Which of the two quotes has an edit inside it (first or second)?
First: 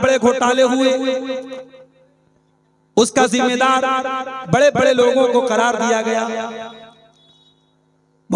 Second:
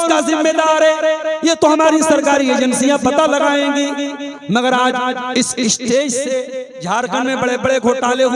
second